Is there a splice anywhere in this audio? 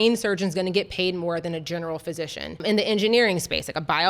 yes; 1 cut; at 2.6 s

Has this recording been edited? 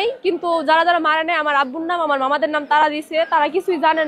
no; 0 cuts

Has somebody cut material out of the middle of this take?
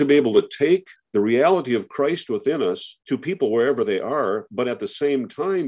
yes; 2 cuts; at 1.0 s, 2.9 s

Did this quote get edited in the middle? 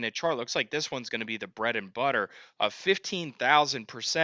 no; 0 cuts

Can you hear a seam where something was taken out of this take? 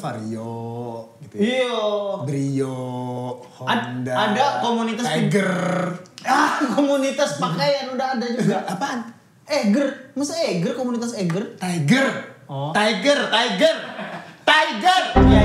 no; 0 cuts

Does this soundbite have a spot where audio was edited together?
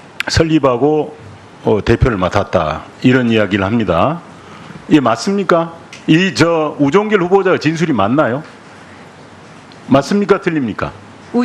yes; 1 cut; at 2.2 s

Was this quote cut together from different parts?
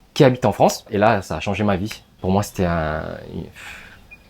yes; 2 cuts; at 0.9 s, 2.1 s

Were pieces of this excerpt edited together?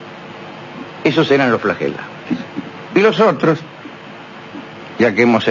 yes; 1 cut; at 2.6 s

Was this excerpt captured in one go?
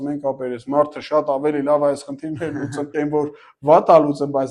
yes; 0 cuts

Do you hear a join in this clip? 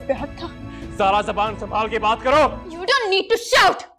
yes; 1 cut; at 2.7 s

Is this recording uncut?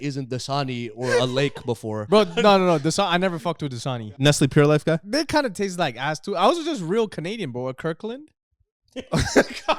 no; 2 cuts; at 4.0 s, 5.0 s

